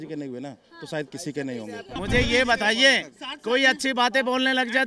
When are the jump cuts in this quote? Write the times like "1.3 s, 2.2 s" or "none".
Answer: 1.9 s